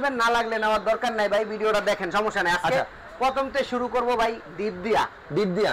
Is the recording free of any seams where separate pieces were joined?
yes; 0 cuts

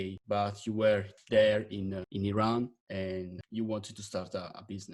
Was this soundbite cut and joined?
no; 0 cuts

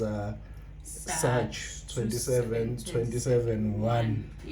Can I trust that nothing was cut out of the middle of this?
yes; 0 cuts

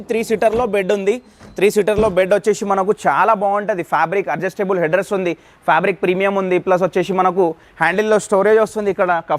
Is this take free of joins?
yes; 0 cuts

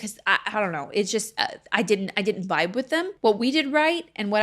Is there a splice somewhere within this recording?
yes; 1 cut; at 3.1 s

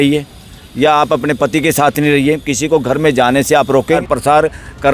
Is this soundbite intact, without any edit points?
no; 1 cut; at 4.0 s

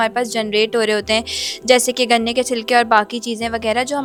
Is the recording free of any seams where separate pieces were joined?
yes; 0 cuts

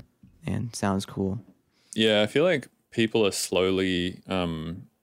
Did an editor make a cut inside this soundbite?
yes; 1 cut; at 1.6 s

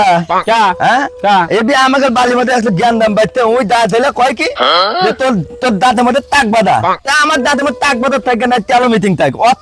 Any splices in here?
no; 0 cuts

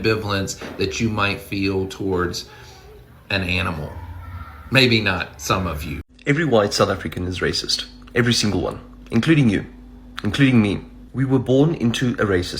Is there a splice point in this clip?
yes; 1 cut; at 6.0 s

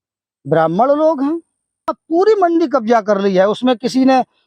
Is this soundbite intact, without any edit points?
no; 1 cut; at 2.0 s

